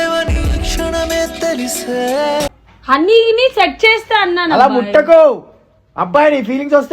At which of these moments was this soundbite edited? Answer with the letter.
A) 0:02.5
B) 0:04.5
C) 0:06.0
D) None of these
A